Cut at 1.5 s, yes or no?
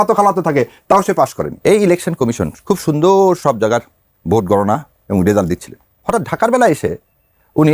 yes